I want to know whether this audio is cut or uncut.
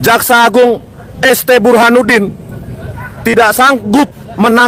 uncut